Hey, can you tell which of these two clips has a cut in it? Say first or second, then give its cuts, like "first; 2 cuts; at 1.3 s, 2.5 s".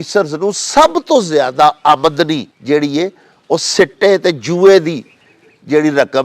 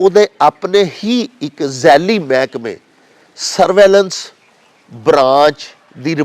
first; 1 cut; at 2.5 s